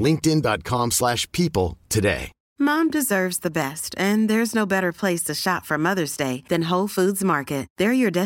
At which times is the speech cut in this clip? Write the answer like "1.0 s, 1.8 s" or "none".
2.4 s